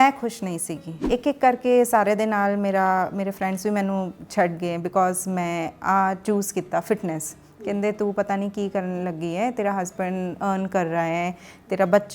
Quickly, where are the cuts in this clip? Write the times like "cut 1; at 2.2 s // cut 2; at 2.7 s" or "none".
cut 1; at 1.0 s